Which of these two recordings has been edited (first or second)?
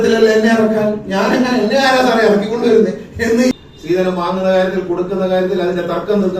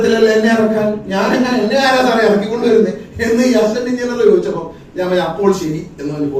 first